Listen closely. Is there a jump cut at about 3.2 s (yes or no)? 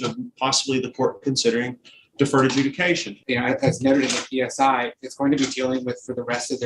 yes